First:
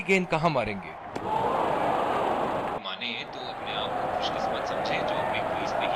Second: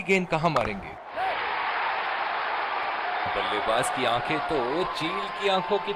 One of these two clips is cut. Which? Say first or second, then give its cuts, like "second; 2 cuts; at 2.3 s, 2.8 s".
second; 2 cuts; at 1.2 s, 3.3 s